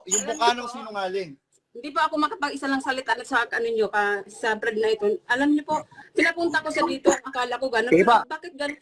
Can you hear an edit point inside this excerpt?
no; 0 cuts

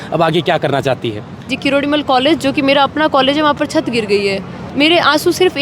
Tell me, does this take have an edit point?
yes; 2 cuts; at 1.5 s, 4.7 s

